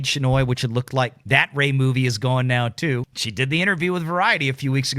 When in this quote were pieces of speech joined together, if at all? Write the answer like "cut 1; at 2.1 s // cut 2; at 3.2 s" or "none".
cut 1; at 1.2 s // cut 2; at 3.1 s